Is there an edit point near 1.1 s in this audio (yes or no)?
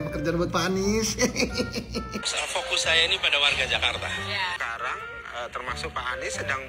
no